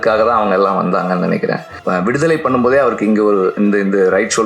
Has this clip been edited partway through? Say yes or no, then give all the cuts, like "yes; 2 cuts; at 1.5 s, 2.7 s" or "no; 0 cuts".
yes; 1 cut; at 1.7 s